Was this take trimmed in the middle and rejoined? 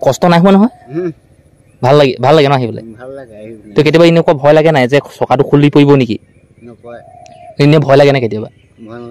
no; 0 cuts

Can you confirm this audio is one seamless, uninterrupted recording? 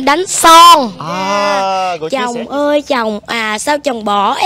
no; 1 cut; at 1.7 s

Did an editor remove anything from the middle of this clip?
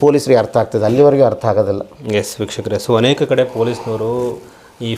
no; 0 cuts

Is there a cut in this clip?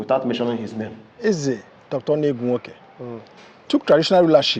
yes; 1 cut; at 1.1 s

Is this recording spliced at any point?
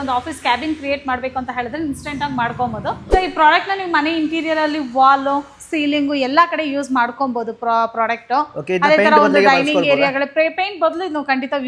yes; 1 cut; at 3.0 s

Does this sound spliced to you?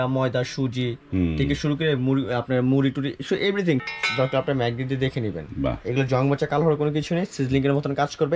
yes; 1 cut; at 3.8 s

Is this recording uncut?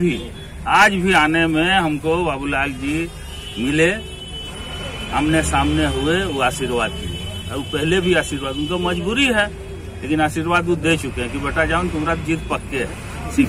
yes; 0 cuts

